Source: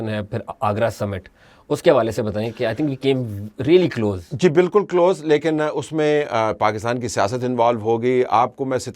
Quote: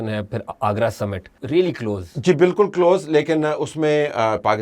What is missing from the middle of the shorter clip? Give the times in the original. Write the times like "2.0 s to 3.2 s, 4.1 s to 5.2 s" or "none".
1.3 s to 3.5 s